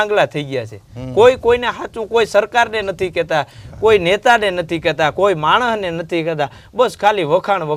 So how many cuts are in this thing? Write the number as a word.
zero